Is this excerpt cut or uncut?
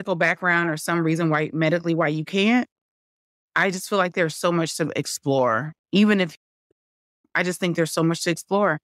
uncut